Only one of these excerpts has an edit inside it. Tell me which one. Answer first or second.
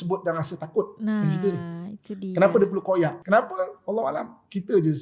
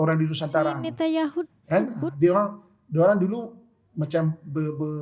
first